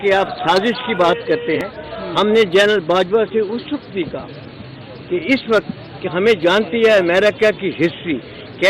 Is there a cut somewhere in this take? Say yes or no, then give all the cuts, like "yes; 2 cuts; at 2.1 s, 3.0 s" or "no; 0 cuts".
yes; 1 cut; at 1.6 s